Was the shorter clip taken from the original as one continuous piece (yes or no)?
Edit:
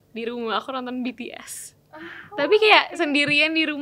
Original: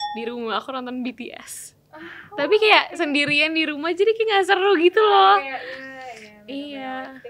yes